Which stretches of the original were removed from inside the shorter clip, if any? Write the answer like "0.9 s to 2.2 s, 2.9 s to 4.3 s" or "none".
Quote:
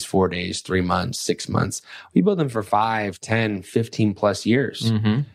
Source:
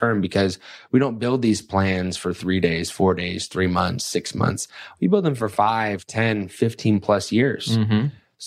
none